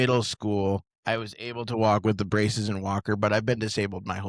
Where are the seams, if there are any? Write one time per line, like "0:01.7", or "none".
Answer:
0:00.9